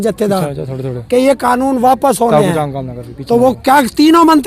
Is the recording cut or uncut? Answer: uncut